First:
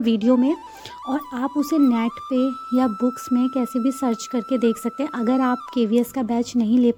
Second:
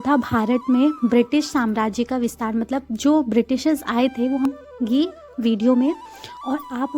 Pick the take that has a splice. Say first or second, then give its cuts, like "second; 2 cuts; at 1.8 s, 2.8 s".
second; 1 cut; at 4.5 s